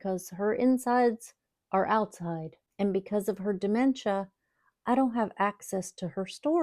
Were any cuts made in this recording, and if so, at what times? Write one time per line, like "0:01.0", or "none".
0:02.6